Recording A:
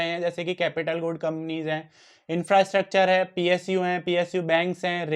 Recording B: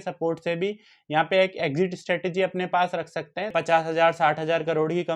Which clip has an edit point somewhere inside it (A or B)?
B